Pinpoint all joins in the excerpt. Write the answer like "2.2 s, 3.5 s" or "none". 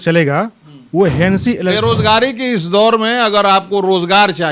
1.7 s